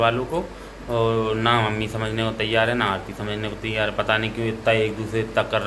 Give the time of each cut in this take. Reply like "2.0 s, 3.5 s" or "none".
none